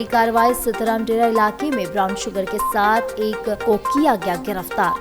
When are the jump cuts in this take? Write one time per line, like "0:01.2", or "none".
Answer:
none